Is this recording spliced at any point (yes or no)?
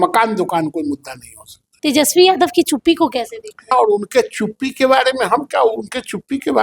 yes